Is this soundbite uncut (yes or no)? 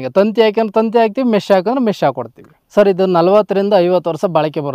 yes